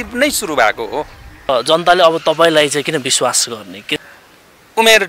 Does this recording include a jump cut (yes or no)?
yes